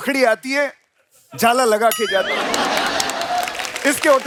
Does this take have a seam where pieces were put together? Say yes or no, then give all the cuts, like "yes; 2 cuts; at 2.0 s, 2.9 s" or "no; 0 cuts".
no; 0 cuts